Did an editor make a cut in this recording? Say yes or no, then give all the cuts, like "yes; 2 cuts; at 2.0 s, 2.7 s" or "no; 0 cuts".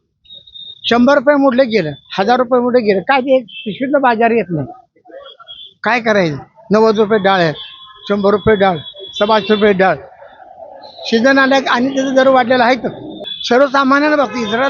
yes; 1 cut; at 13.3 s